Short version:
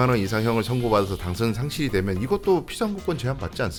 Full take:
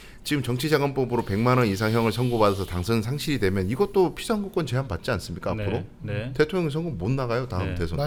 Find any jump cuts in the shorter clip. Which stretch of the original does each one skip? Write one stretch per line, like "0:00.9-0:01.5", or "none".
none